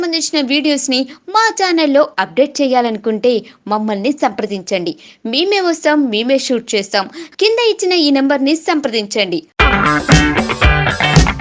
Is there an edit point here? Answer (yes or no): no